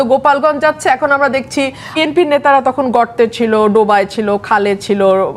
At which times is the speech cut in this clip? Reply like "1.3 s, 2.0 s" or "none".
1.9 s